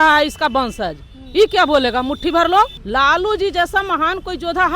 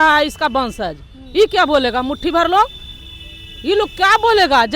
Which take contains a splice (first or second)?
first